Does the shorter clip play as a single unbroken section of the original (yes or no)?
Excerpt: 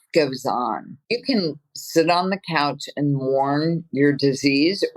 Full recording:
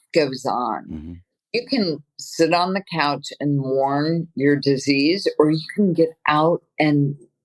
no